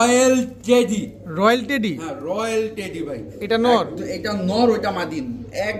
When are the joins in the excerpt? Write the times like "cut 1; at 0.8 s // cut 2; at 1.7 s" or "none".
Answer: none